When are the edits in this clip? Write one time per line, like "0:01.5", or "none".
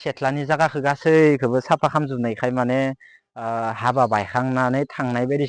none